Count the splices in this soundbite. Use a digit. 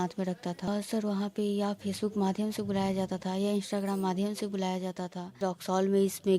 2